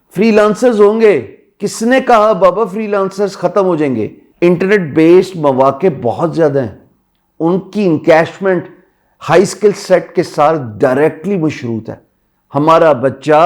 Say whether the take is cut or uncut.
cut